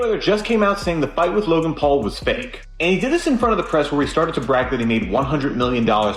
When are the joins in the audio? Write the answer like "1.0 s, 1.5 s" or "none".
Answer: none